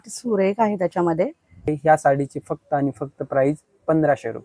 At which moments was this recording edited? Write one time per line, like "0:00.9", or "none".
0:01.7